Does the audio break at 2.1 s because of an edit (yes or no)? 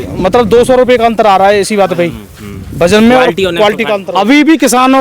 no